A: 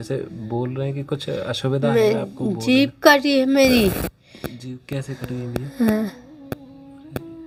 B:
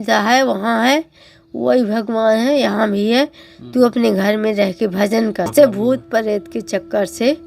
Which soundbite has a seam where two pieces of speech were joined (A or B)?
B